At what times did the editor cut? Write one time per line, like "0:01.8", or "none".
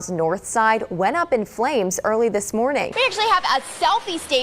0:02.9